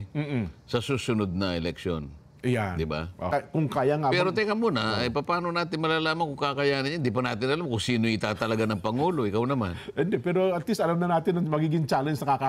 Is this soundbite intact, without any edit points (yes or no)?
no